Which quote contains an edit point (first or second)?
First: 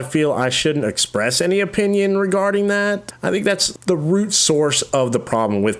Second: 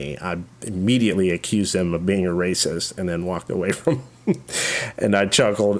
first